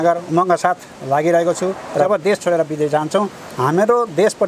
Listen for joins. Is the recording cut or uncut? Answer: cut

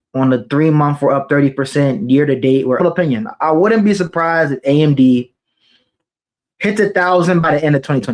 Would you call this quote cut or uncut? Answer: cut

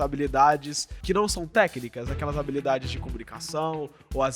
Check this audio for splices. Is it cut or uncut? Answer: cut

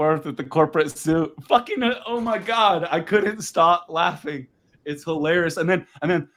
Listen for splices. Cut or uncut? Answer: uncut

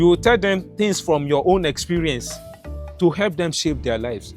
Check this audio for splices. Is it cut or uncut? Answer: uncut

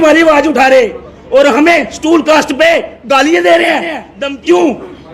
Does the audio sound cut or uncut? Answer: cut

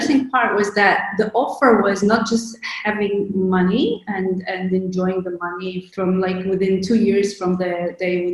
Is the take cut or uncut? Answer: cut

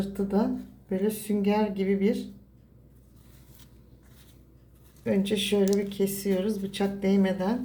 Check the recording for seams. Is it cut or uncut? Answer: uncut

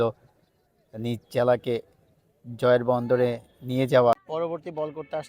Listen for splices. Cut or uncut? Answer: cut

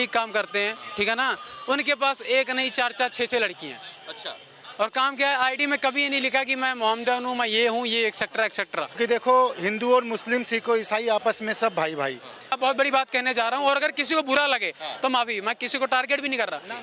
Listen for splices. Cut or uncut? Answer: cut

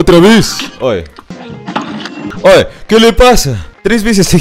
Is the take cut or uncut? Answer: cut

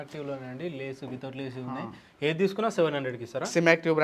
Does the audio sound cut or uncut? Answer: uncut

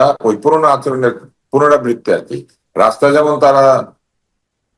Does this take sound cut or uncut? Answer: uncut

